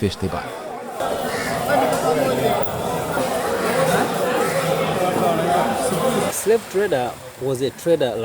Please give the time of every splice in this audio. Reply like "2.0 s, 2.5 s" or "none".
3.2 s, 6.3 s